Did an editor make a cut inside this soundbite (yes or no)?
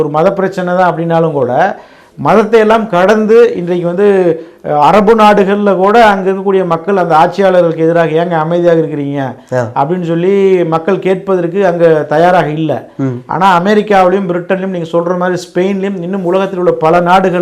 no